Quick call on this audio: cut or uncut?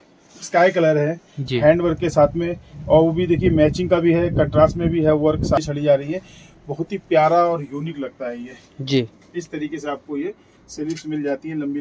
cut